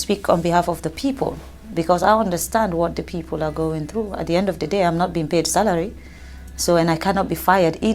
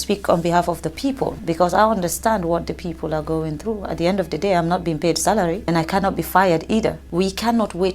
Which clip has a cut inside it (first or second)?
second